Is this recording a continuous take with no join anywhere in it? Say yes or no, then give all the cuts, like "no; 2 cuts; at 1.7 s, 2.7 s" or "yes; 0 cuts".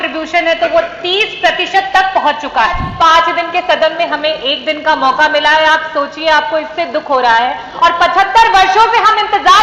no; 1 cut; at 2.9 s